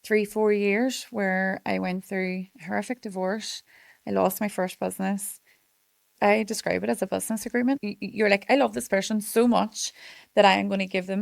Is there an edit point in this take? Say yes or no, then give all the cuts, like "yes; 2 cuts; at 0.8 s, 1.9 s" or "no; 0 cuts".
yes; 2 cuts; at 6.1 s, 7.8 s